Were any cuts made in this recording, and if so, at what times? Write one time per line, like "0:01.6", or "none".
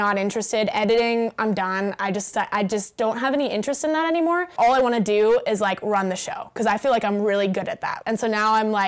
0:04.5
0:07.9